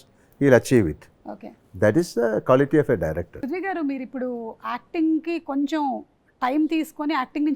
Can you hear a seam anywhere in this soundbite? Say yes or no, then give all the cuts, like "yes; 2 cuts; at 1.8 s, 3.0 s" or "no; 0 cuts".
yes; 1 cut; at 3.4 s